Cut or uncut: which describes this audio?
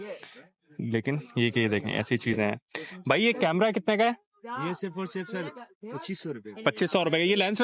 uncut